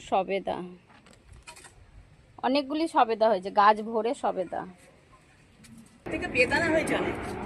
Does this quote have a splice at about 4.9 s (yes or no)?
no